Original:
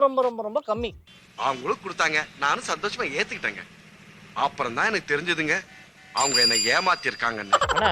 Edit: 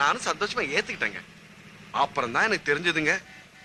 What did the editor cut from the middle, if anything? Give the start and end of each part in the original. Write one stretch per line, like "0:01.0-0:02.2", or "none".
none

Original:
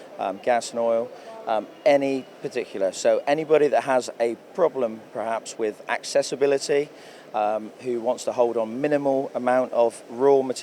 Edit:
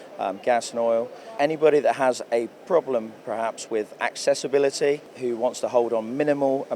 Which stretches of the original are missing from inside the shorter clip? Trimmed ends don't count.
0:01.3-0:03.2
0:07.0-0:07.8

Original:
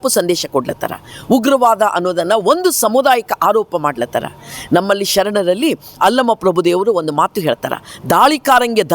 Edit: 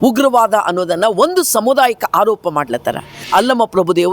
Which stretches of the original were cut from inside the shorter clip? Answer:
0:04.5-0:05.9

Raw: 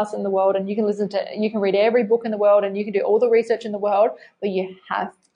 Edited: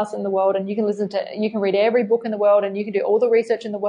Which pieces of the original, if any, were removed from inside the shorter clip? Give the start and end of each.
none

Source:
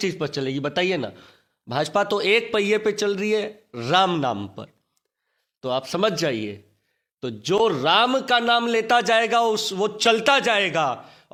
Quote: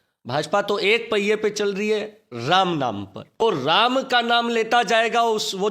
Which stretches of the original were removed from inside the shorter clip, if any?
0:04.8-0:07.6

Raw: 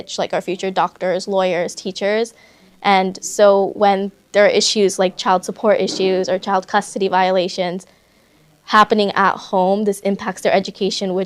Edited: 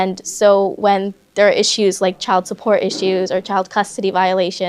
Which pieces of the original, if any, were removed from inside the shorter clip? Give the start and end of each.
none

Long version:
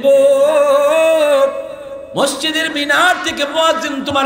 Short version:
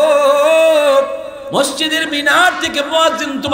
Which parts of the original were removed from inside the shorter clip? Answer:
0:01.8-0:02.0

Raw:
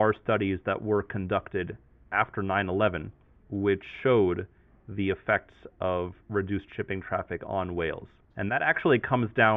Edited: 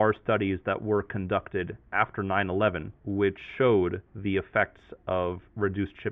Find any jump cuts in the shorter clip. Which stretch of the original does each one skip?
0:01.8-0:02.0
0:03.1-0:03.4
0:04.5-0:04.8

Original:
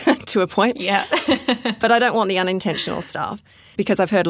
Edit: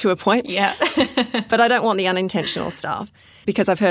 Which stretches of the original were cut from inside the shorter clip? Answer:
none

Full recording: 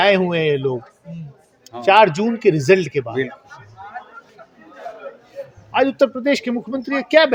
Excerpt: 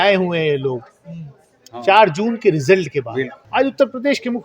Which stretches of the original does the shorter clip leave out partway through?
0:03.4-0:05.6

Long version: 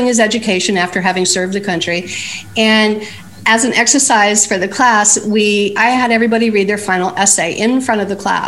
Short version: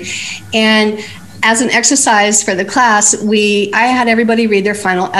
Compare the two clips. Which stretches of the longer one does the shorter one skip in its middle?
none

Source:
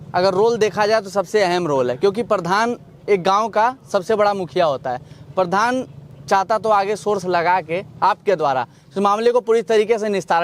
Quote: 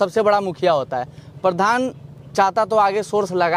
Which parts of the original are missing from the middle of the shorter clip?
none

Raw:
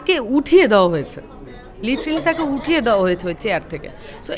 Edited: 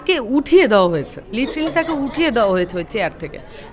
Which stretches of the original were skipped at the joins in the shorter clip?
0:01.2-0:01.7

